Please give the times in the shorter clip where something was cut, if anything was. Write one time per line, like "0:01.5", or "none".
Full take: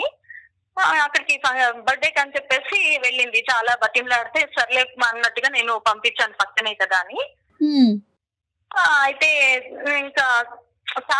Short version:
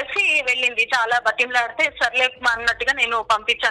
none